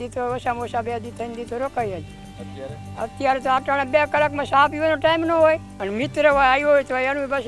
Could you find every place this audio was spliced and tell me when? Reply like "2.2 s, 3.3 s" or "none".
5.7 s

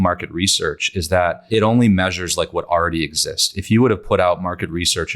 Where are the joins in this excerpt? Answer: 1.4 s

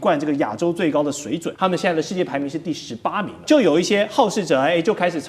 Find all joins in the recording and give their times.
1.5 s, 3.4 s

